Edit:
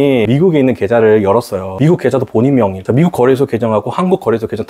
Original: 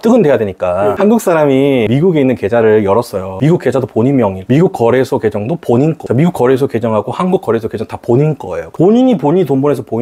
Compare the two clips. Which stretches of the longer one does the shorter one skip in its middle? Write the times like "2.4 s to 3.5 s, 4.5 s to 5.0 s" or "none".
4.4 s to 6.0 s